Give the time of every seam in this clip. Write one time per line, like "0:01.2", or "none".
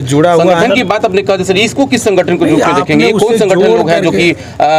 none